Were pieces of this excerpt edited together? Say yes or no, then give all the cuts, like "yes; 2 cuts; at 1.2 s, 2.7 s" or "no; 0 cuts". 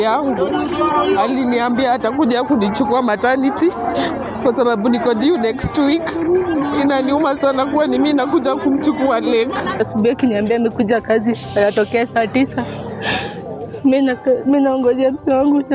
yes; 1 cut; at 9.8 s